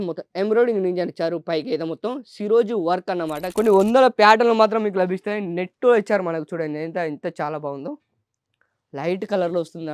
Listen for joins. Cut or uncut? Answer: cut